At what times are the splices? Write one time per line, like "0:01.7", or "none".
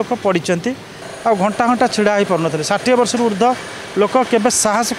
0:01.0